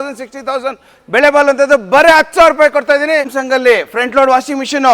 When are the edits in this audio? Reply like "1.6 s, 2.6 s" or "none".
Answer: 3.3 s